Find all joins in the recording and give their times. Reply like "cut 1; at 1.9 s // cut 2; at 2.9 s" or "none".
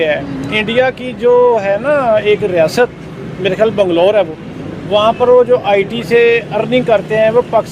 none